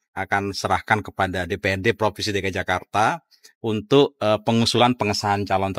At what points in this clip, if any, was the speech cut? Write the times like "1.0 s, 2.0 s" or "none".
none